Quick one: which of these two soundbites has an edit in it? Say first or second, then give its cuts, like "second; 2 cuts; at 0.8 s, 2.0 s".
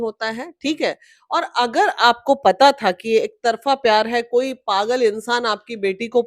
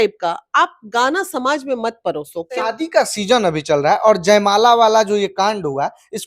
second; 1 cut; at 2.5 s